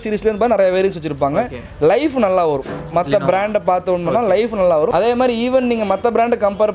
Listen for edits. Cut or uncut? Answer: cut